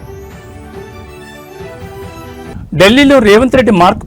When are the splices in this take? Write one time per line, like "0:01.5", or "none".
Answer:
0:01.7

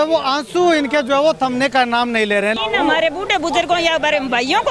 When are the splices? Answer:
0:02.5

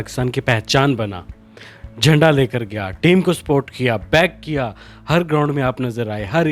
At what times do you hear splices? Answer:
none

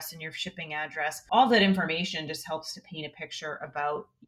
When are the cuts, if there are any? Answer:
0:01.2

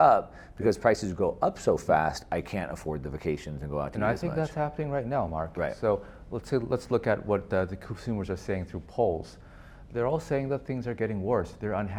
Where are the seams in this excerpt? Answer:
none

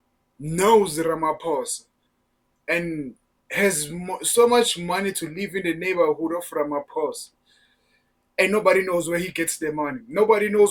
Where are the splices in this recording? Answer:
none

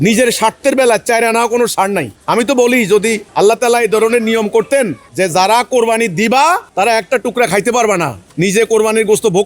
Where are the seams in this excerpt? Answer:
0:02.1
0:03.2
0:05.0
0:06.7
0:08.2

